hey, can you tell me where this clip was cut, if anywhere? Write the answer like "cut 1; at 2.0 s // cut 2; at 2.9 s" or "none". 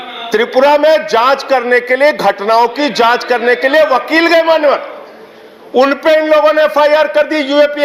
none